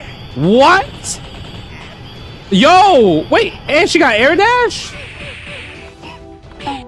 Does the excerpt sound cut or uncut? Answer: cut